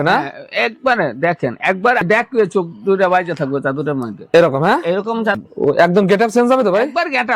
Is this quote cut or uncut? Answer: cut